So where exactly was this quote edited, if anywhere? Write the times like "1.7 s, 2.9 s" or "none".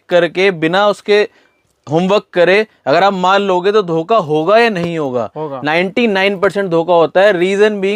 none